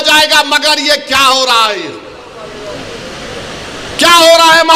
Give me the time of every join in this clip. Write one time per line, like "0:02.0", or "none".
none